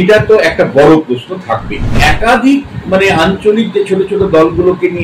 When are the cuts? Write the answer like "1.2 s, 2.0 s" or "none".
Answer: 2.0 s